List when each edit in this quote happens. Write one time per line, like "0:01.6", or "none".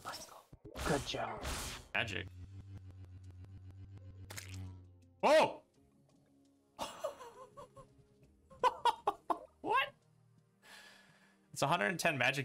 0:01.9